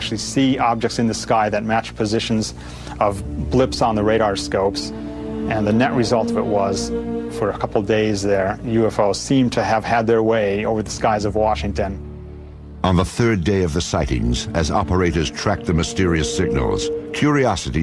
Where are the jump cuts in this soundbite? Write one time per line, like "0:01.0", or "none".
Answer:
0:09.6